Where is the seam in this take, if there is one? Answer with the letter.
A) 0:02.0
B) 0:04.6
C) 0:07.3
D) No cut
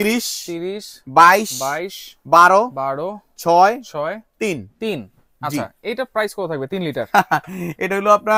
D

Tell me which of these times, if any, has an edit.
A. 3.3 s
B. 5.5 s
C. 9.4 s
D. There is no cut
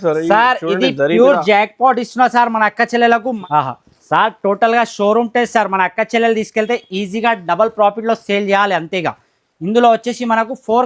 A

